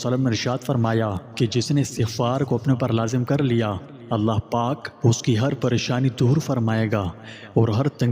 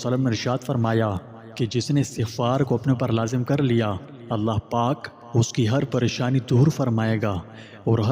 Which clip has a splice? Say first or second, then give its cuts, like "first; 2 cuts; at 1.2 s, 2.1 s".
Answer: first; 2 cuts; at 1.2 s, 4.9 s